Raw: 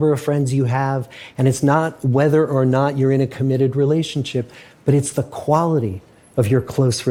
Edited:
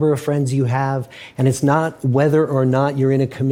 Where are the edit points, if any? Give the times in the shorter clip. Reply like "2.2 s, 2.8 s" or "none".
none